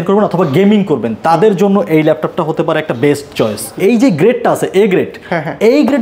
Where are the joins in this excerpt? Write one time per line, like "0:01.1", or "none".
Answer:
0:03.7